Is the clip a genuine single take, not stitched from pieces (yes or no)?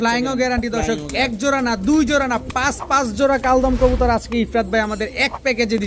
yes